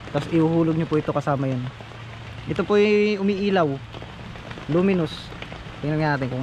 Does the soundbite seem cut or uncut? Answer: uncut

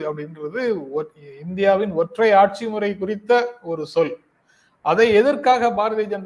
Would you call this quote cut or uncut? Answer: uncut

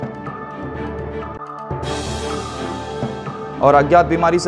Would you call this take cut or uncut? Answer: cut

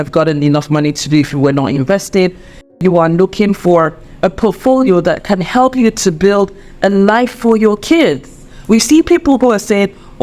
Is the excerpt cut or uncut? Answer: cut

